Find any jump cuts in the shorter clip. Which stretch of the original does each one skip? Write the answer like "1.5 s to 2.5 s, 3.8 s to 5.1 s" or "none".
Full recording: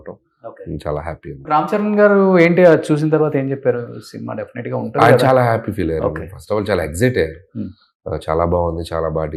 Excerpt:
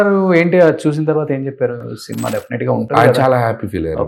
none